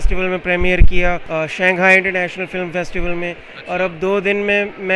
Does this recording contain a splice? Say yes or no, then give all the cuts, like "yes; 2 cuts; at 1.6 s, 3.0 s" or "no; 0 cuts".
yes; 1 cut; at 1.2 s